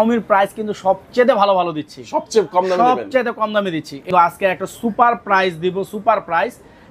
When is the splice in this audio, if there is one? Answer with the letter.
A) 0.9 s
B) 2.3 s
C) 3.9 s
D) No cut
C